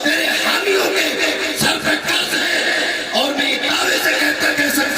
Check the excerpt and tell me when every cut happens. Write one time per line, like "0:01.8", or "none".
none